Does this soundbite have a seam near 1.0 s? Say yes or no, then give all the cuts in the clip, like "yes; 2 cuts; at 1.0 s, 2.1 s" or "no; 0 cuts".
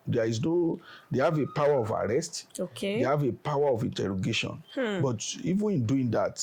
no; 0 cuts